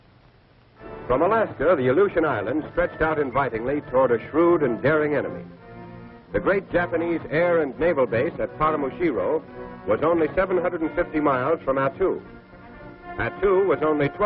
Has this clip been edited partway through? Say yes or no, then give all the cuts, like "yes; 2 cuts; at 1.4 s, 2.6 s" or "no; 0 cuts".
no; 0 cuts